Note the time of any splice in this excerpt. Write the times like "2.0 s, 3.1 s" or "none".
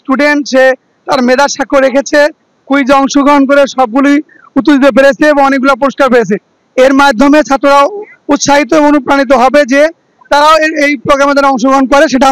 none